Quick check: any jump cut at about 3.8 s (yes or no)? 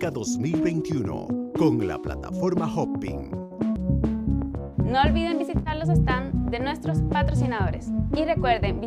yes